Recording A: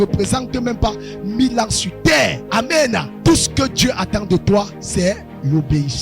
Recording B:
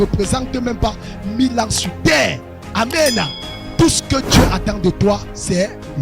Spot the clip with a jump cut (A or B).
A